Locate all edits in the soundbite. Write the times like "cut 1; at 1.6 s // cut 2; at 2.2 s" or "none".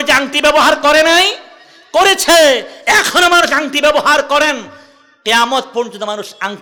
none